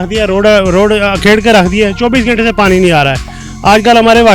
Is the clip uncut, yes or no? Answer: yes